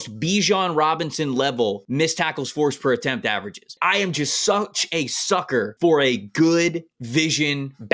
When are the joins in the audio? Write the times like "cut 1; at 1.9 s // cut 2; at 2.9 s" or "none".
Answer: cut 1; at 1.8 s // cut 2; at 3.7 s // cut 3; at 5.7 s // cut 4; at 7.0 s